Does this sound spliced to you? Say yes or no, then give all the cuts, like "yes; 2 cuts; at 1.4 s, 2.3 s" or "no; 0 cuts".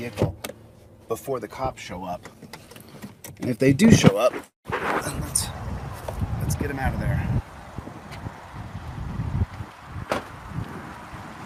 no; 0 cuts